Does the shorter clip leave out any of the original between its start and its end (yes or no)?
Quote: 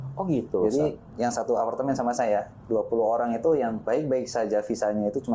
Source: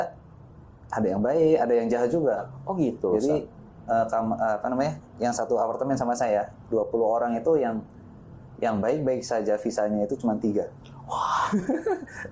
yes